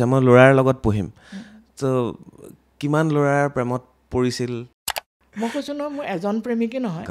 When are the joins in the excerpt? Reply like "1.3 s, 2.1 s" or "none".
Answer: 4.8 s